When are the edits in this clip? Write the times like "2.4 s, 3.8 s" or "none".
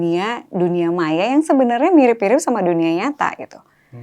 none